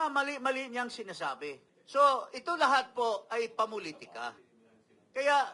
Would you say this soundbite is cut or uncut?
cut